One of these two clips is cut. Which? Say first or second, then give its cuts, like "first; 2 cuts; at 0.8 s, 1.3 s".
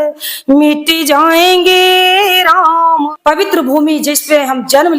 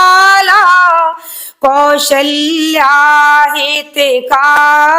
first; 1 cut; at 3.1 s